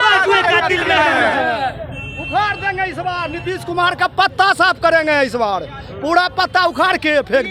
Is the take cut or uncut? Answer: uncut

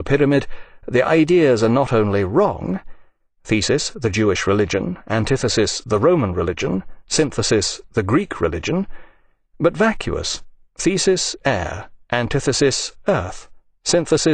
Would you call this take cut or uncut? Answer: uncut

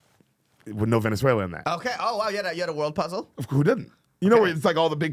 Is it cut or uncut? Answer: uncut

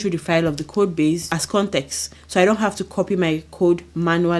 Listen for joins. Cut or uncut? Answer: cut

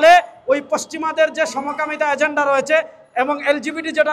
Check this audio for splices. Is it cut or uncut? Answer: uncut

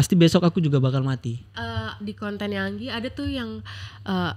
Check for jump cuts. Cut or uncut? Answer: cut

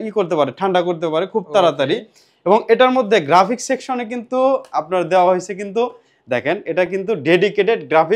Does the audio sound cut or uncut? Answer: uncut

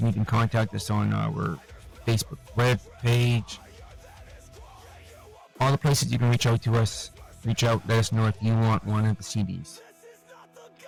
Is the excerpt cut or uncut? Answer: uncut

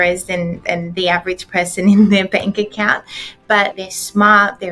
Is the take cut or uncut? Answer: cut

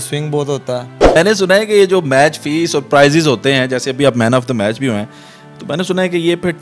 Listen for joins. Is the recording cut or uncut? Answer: cut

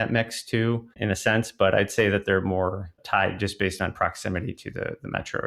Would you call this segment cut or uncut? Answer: cut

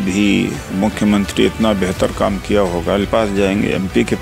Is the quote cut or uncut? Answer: uncut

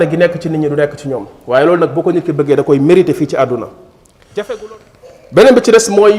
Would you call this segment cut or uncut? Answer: cut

